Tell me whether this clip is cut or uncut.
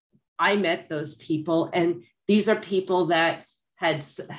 uncut